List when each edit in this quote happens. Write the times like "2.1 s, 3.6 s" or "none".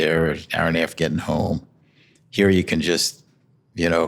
none